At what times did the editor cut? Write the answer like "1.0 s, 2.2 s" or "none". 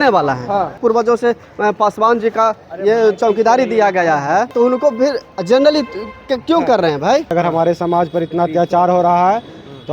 0.8 s, 4.5 s, 7.3 s

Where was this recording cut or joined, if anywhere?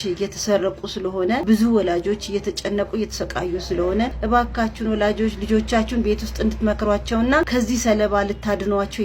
1.4 s, 4.2 s, 7.5 s

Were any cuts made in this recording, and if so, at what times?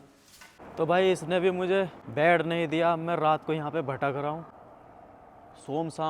2.0 s

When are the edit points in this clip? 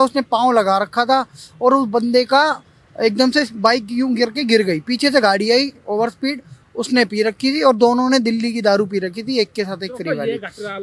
none

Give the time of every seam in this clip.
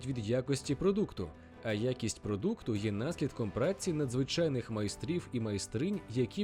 none

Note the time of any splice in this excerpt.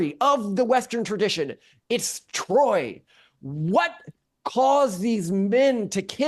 none

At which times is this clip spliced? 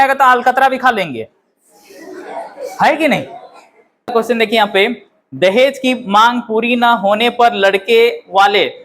4.1 s

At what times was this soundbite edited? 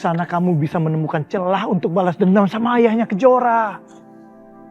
none

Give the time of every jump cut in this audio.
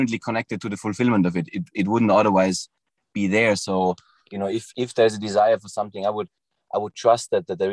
none

